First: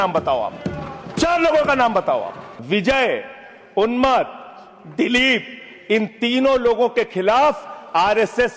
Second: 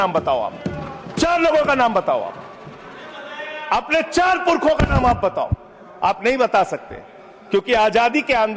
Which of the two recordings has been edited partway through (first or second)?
first